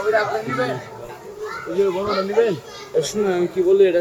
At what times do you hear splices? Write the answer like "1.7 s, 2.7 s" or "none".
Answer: 2.8 s